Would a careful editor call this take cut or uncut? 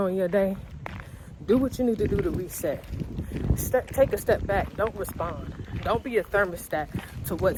uncut